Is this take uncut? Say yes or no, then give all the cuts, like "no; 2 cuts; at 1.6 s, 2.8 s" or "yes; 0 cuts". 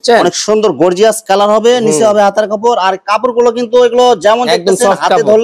yes; 0 cuts